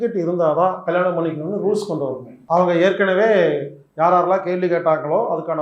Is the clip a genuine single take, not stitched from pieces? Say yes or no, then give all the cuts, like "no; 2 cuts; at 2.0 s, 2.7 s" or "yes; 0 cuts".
no; 1 cut; at 2.3 s